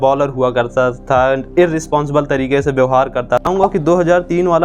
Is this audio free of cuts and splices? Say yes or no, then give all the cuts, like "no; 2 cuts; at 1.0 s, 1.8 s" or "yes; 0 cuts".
no; 1 cut; at 3.5 s